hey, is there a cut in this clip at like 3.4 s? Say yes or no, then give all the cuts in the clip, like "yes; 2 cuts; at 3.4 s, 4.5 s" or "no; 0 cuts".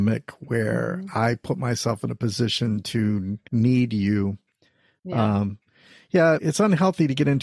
yes; 2 cuts; at 3.4 s, 6.4 s